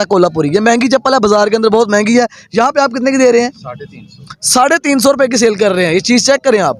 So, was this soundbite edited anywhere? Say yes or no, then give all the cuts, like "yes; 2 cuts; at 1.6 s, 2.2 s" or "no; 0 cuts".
no; 0 cuts